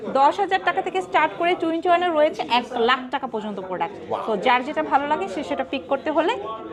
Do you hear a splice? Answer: no; 0 cuts

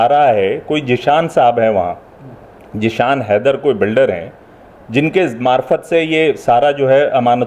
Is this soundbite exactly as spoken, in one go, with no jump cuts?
yes; 0 cuts

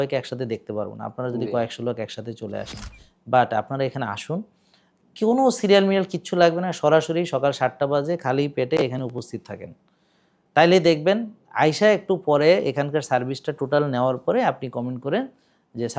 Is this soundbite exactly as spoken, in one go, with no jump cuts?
yes; 0 cuts

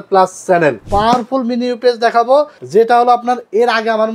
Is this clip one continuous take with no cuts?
no; 2 cuts; at 0.8 s, 2.6 s

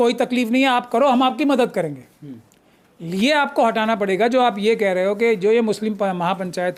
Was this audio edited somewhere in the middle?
no; 0 cuts

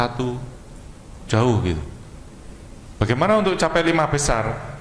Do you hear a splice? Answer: no; 0 cuts

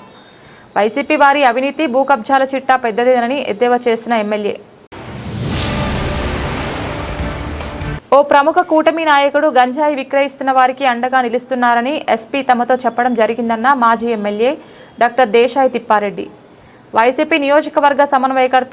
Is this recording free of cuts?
yes; 0 cuts

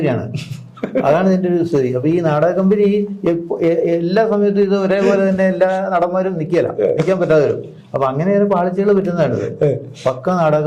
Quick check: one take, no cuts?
yes; 0 cuts

